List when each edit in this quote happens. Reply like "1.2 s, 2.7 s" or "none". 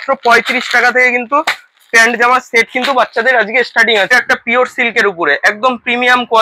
4.1 s